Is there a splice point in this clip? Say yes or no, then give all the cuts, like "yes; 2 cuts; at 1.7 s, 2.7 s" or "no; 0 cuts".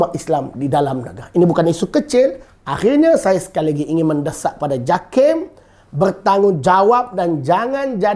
yes; 1 cut; at 2.4 s